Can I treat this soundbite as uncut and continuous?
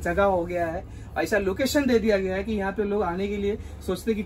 yes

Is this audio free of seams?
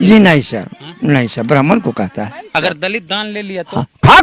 no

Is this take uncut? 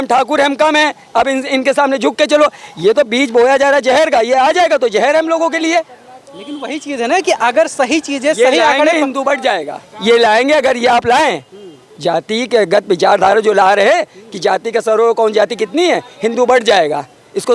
yes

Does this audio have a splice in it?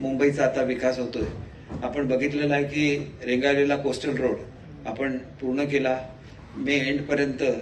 no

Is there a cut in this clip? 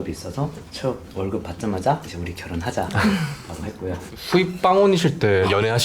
yes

